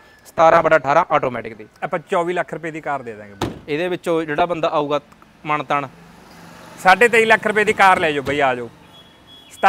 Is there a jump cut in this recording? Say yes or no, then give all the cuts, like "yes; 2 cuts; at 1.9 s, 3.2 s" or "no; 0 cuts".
no; 0 cuts